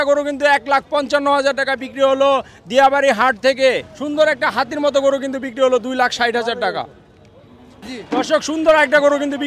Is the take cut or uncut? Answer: cut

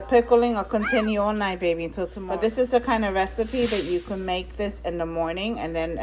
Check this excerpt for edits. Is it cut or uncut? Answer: cut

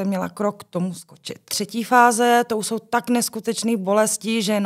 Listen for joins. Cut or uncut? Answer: cut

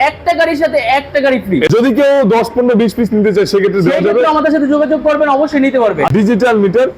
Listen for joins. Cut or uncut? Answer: cut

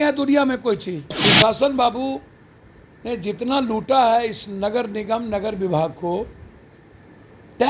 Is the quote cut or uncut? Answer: cut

